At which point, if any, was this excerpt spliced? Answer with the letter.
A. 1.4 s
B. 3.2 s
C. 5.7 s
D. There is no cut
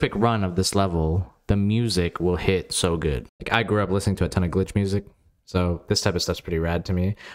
B